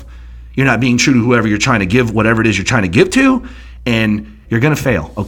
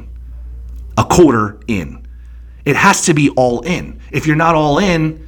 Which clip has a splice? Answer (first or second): first